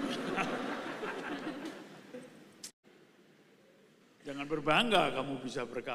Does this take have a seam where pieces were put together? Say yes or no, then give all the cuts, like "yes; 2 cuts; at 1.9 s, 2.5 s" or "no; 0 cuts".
yes; 1 cut; at 2.7 s